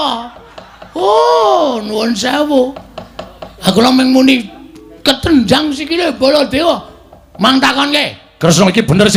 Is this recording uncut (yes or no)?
yes